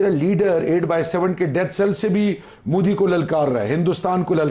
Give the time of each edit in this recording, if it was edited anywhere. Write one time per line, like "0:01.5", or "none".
none